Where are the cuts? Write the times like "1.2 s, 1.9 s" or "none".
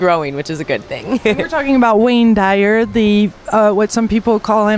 1.4 s